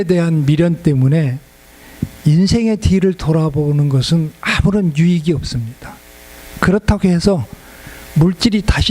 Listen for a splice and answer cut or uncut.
uncut